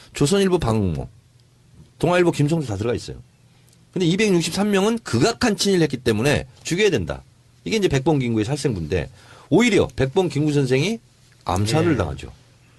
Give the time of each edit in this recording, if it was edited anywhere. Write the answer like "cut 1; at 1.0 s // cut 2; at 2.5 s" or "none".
none